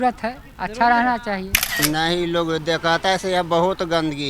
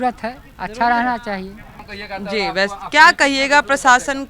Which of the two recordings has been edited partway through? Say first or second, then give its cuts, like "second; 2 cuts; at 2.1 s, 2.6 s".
first; 1 cut; at 1.7 s